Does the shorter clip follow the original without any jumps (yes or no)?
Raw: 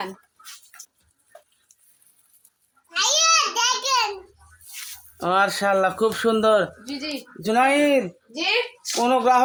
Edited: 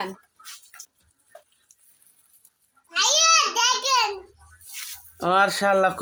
yes